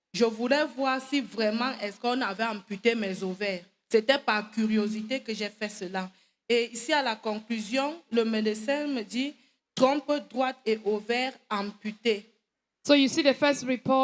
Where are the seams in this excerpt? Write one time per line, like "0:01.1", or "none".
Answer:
none